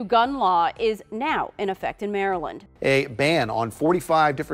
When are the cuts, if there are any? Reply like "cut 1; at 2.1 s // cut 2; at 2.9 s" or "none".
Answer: cut 1; at 2.6 s

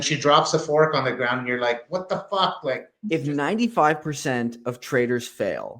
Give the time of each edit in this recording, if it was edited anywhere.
cut 1; at 2.9 s

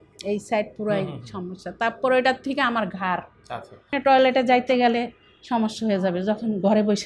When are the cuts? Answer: cut 1; at 3.9 s

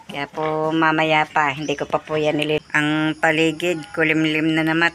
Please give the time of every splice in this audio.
cut 1; at 2.6 s

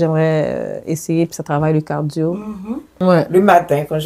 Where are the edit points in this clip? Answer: cut 1; at 3.0 s

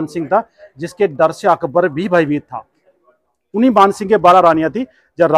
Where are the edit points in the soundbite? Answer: none

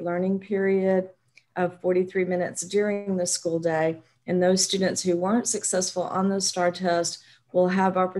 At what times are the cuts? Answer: none

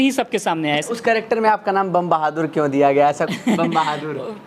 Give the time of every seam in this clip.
cut 1; at 0.9 s // cut 2; at 3.3 s

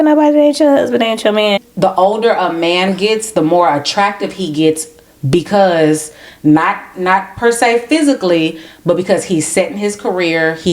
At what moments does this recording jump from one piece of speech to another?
cut 1; at 1.7 s

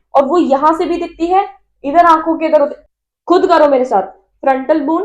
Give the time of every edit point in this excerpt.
cut 1; at 2.9 s

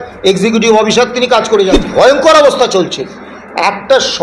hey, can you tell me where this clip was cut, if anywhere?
cut 1; at 1.7 s

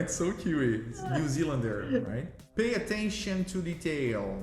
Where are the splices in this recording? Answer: cut 1; at 0.9 s // cut 2; at 2.4 s

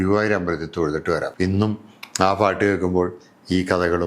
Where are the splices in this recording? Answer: cut 1; at 1.3 s

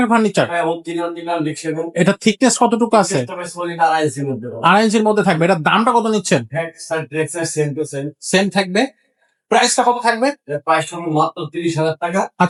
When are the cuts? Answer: none

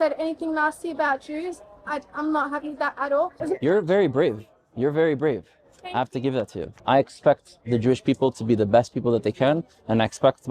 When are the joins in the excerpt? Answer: cut 1; at 3.4 s // cut 2; at 6.7 s

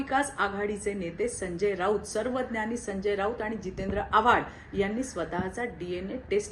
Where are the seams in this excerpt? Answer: none

